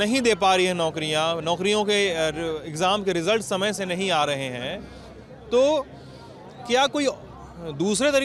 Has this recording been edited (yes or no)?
no